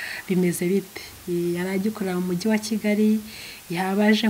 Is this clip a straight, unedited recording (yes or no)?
yes